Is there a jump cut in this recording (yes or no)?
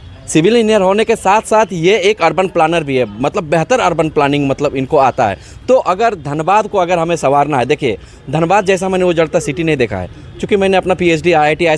no